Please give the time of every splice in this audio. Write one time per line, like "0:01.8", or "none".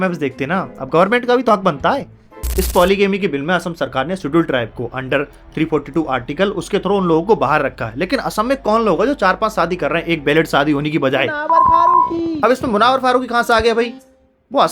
0:02.2